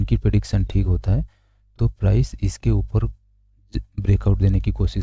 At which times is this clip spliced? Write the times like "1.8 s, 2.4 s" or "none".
none